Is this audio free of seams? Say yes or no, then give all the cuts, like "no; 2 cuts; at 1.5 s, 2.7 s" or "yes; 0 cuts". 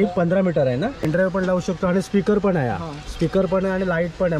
no; 1 cut; at 1.1 s